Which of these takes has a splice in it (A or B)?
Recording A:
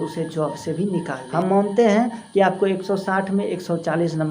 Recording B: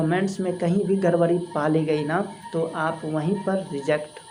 A